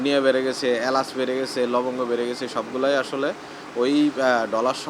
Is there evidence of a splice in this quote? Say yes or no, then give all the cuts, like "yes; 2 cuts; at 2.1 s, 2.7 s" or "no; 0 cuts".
no; 0 cuts